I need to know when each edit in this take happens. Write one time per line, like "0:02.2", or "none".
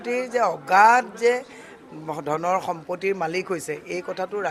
none